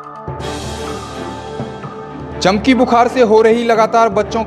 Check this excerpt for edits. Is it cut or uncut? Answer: cut